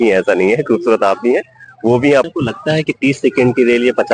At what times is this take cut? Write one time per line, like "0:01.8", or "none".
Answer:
0:02.3